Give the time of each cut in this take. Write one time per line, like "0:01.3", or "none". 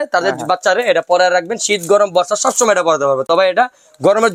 none